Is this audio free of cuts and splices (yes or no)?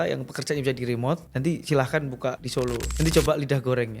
no